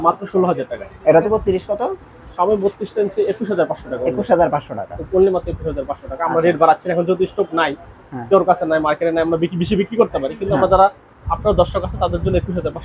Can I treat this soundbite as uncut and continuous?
no; 1 cut; at 1.3 s

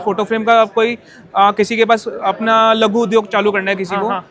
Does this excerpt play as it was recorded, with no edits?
yes; 0 cuts

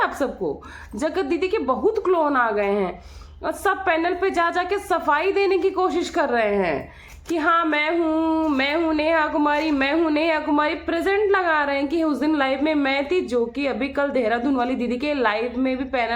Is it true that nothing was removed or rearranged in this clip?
yes; 0 cuts

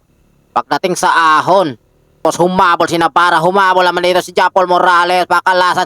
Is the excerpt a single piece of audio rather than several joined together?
no; 1 cut; at 2.2 s

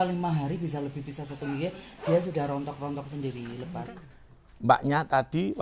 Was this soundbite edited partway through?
yes; 1 cut; at 3.8 s

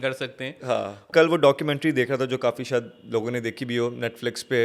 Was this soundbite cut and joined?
yes; 1 cut; at 1.1 s

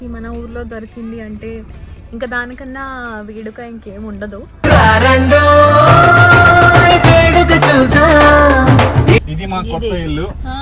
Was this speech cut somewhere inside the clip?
yes; 1 cut; at 9.2 s

